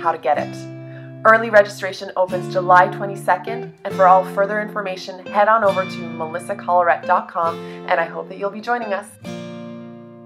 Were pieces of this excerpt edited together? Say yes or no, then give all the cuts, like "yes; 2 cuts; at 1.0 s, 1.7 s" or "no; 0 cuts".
yes; 1 cut; at 9.1 s